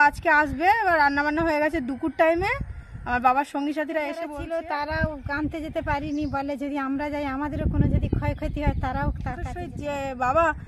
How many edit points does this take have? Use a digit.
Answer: 2